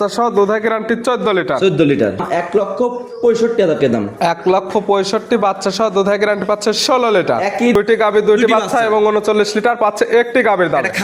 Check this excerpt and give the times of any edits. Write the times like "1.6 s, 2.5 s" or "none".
2.2 s, 7.8 s